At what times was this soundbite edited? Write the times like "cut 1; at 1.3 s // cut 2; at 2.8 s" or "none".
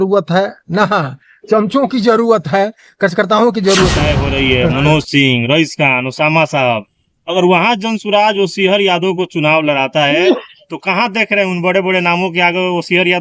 cut 1; at 4.1 s